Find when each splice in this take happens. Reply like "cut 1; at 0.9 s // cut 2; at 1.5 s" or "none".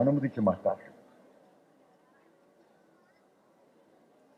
none